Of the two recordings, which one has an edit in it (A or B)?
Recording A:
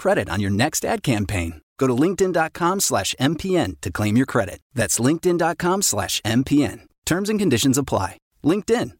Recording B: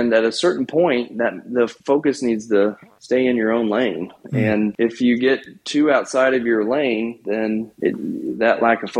B